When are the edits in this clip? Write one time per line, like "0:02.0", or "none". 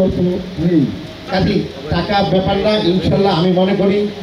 0:01.3